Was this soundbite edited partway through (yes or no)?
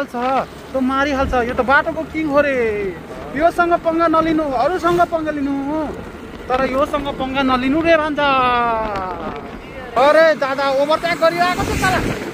yes